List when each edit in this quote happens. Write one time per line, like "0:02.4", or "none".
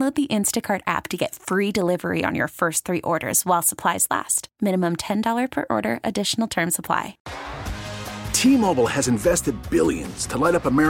0:07.2

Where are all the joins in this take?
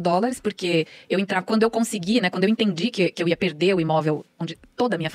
none

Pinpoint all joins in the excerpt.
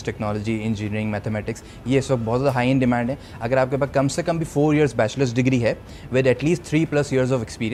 none

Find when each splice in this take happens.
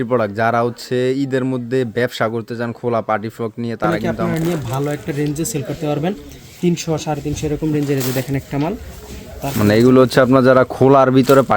0:04.2

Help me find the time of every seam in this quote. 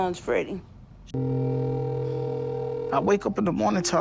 0:00.9

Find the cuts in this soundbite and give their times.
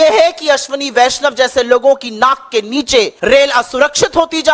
0:03.1

